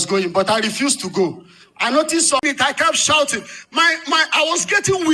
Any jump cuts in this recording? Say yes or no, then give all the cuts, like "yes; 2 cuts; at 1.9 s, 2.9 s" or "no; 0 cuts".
yes; 1 cut; at 2.4 s